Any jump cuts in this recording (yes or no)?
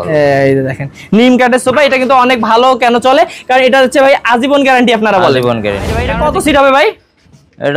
yes